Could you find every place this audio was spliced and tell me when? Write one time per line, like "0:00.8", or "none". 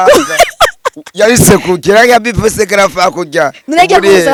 none